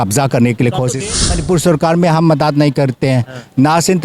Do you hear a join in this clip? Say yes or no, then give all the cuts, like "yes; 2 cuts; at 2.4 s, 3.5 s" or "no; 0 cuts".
yes; 1 cut; at 1.2 s